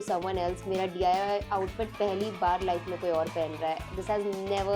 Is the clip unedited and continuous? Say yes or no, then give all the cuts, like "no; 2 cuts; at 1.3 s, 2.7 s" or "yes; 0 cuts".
yes; 0 cuts